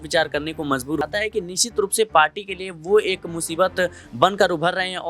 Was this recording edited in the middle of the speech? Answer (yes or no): yes